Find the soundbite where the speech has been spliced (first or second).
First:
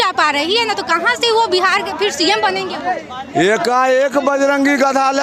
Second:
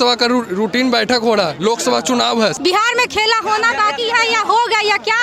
second